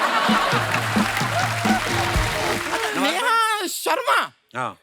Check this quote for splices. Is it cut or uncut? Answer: cut